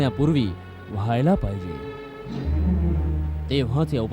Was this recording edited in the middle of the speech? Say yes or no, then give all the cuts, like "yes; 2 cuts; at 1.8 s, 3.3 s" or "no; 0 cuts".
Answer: no; 0 cuts